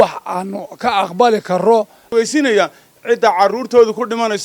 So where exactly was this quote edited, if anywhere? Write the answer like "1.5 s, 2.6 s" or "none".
2.0 s